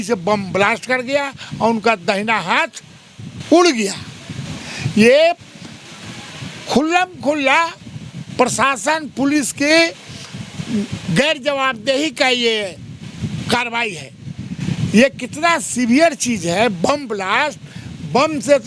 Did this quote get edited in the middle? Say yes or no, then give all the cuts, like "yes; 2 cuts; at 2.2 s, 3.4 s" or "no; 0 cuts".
no; 0 cuts